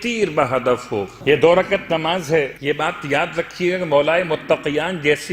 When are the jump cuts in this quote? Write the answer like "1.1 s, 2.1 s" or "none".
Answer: 1.1 s, 2.6 s